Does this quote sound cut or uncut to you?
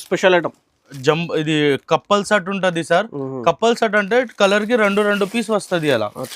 cut